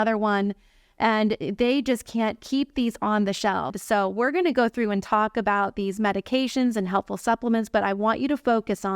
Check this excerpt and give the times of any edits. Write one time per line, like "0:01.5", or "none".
0:03.7